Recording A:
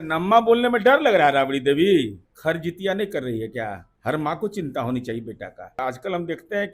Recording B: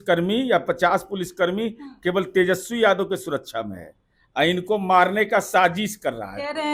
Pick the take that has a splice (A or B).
A